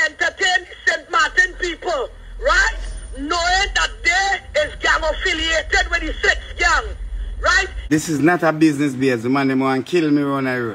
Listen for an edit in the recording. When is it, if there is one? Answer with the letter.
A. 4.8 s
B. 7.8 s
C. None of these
B